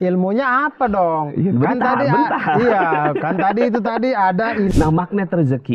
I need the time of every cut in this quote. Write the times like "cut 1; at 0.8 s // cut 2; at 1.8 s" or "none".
cut 1; at 4.7 s